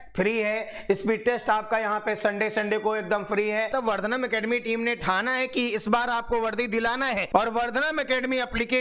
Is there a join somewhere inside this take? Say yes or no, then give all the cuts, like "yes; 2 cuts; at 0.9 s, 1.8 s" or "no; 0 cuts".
yes; 2 cuts; at 3.7 s, 7.2 s